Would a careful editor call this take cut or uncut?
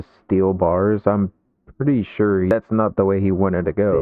uncut